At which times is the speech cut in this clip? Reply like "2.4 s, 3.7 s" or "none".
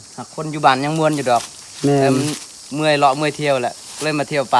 none

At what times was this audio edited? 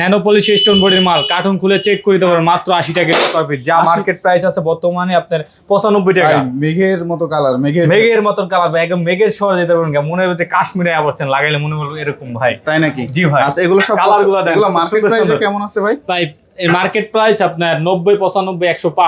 none

